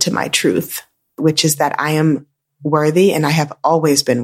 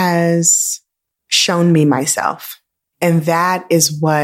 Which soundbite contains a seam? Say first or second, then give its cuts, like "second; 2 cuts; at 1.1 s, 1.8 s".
first; 1 cut; at 1.1 s